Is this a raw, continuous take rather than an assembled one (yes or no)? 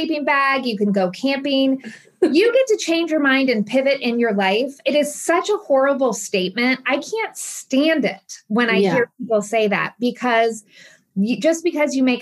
no